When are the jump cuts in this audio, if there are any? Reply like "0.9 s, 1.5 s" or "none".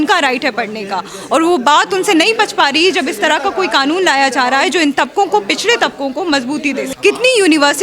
6.9 s